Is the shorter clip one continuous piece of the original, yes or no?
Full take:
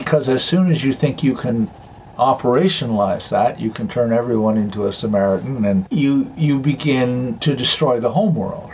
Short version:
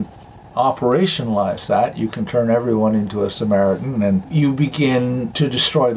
no